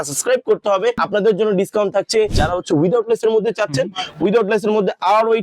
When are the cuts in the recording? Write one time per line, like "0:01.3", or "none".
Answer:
0:01.0
0:02.4